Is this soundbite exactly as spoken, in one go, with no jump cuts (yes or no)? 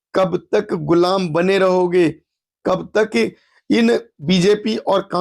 no